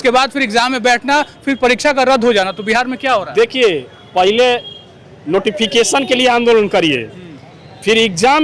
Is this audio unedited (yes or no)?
yes